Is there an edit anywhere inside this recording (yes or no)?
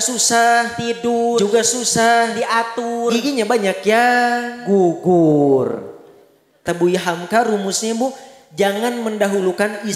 yes